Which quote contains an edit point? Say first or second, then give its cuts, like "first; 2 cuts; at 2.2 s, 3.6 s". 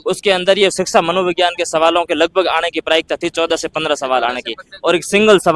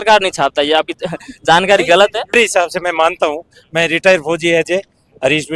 second; 1 cut; at 2.3 s